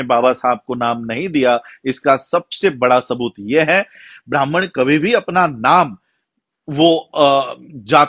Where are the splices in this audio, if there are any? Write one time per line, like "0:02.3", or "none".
0:04.1